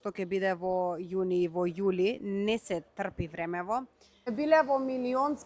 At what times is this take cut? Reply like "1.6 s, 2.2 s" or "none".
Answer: 4.3 s